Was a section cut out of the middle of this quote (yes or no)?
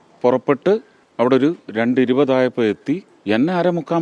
yes